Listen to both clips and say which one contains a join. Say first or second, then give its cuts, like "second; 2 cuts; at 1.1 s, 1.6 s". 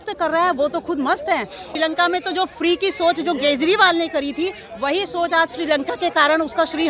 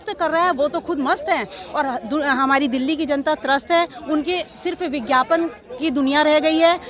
first; 1 cut; at 1.7 s